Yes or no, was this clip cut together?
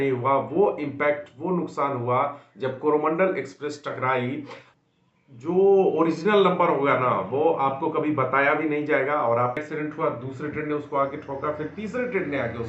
yes